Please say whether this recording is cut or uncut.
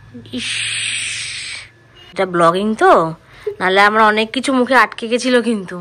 uncut